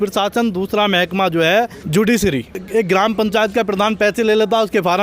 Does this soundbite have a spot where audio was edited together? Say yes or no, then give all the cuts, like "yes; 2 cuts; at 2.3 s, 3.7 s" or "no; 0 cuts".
yes; 2 cuts; at 1.8 s, 2.6 s